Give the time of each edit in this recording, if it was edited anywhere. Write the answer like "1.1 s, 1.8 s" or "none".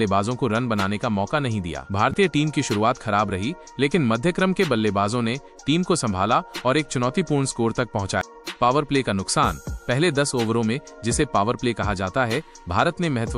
1.8 s, 8.4 s